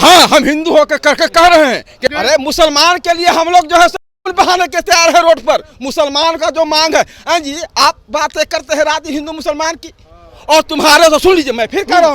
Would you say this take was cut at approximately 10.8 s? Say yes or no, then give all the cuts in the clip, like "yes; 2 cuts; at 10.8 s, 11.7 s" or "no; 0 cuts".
no; 1 cut; at 2.1 s